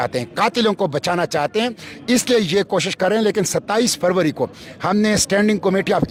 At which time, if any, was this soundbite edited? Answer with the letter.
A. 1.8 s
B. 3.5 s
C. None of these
C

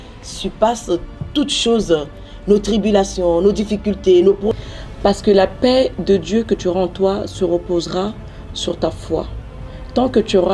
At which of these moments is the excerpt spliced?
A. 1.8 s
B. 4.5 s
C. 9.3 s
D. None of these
B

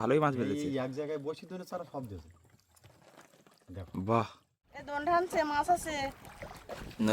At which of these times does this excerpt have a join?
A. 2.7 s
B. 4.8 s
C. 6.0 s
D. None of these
B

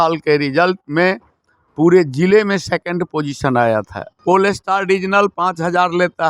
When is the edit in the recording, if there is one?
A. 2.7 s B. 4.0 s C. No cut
B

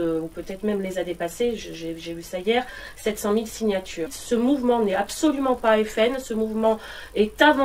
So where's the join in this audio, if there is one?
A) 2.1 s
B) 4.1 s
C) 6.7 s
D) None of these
B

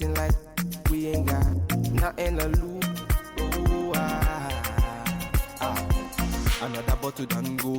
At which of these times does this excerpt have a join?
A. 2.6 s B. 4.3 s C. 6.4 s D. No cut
D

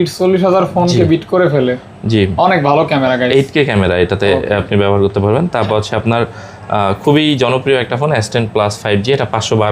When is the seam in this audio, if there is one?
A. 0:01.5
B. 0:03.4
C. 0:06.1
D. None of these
D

